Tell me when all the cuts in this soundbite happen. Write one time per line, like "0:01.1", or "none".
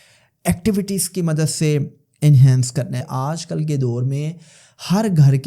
0:03.0